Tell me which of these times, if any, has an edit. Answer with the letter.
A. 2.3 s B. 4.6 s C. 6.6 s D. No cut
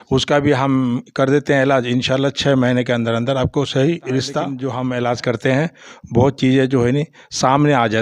B